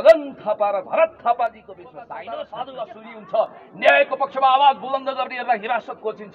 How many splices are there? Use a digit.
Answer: 1